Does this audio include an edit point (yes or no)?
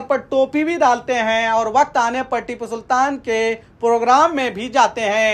no